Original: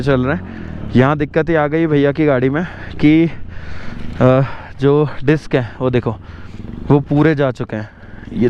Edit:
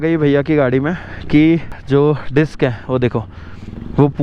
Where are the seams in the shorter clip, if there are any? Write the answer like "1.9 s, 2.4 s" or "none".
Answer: 1.7 s